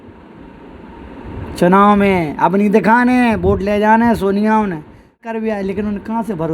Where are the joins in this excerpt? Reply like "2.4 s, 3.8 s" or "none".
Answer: 5.4 s

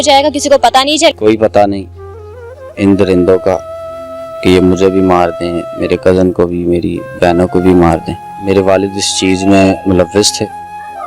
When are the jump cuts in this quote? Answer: 1.2 s, 8.4 s

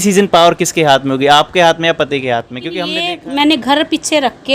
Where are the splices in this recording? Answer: 3.1 s

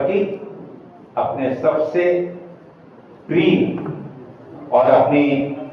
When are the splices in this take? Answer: none

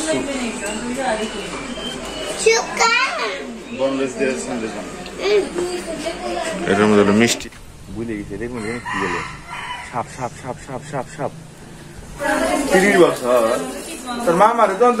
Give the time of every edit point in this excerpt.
7.4 s, 12.2 s

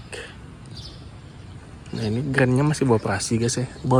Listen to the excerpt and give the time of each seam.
none

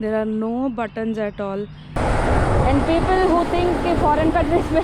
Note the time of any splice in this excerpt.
1.9 s

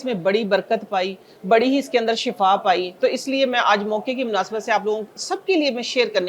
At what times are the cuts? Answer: none

